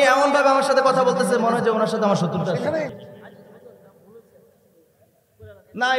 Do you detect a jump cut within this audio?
yes; 1 cut; at 2.9 s

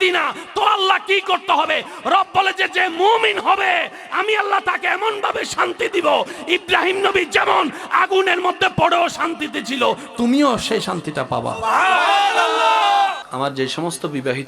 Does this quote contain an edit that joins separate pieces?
yes; 1 cut; at 13.2 s

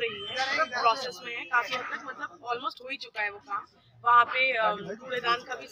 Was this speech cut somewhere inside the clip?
no; 0 cuts

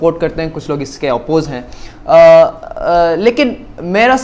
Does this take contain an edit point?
no; 0 cuts

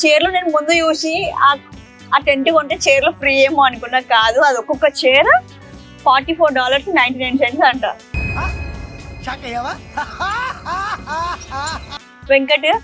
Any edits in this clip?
no; 0 cuts

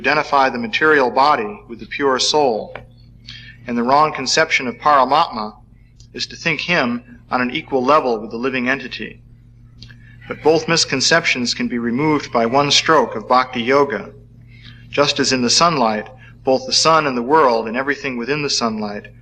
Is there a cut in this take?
no; 0 cuts

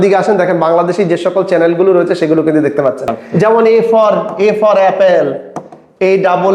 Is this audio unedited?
no; 1 cut; at 3.2 s

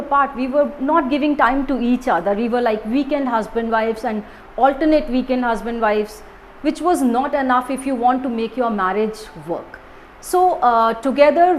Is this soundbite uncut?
yes; 0 cuts

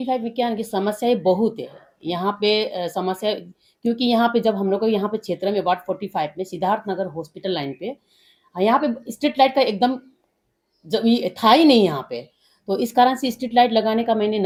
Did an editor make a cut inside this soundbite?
no; 0 cuts

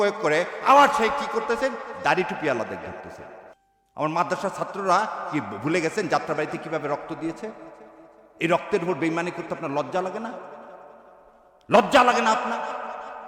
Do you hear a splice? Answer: no; 0 cuts

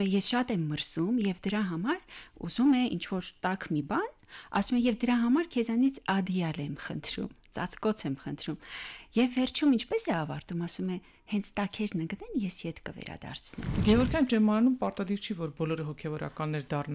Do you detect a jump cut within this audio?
yes; 1 cut; at 13.8 s

